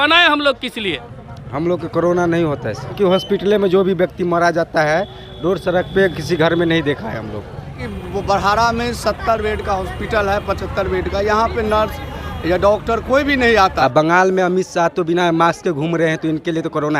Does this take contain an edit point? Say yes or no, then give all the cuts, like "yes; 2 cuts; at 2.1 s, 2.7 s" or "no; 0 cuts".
yes; 4 cuts; at 1.0 s, 3.0 s, 7.5 s, 13.8 s